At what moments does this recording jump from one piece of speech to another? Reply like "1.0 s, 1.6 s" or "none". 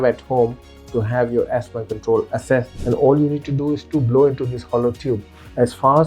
2.7 s